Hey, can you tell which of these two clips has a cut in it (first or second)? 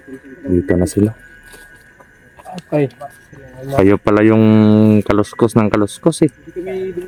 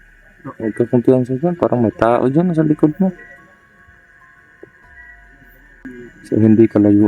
second